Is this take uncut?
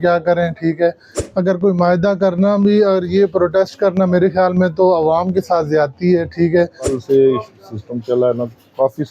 no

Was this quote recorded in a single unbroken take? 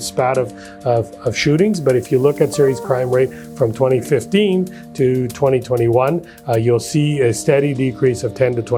yes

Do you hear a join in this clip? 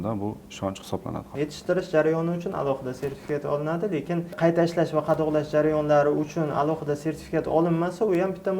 yes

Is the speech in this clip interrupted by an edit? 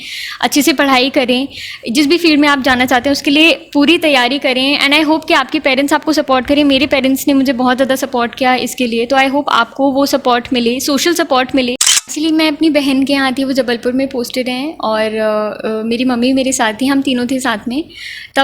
yes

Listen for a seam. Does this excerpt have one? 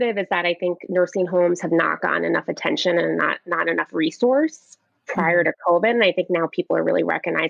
no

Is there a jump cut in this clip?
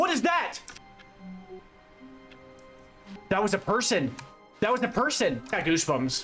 yes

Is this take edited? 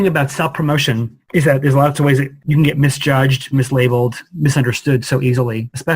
yes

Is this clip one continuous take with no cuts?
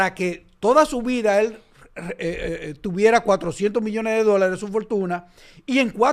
yes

